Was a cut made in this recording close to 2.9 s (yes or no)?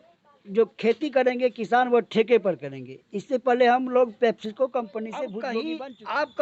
no